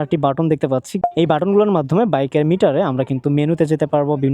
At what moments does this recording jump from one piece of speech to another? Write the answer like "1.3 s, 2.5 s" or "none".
1.0 s